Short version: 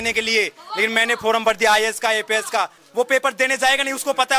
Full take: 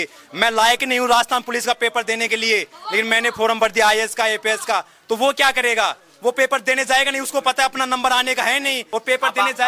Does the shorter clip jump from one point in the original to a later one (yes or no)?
yes